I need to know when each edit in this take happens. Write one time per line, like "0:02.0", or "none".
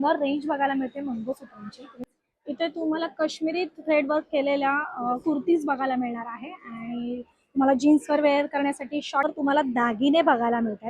0:02.0
0:09.3